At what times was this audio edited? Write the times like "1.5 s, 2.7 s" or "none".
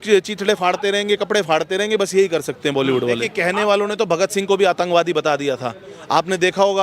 3.3 s